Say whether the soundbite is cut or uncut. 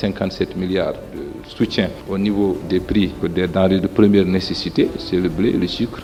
uncut